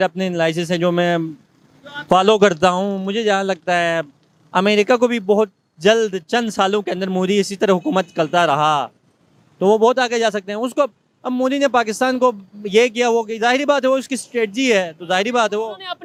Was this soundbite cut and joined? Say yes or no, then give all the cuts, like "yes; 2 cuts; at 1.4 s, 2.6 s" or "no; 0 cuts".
no; 0 cuts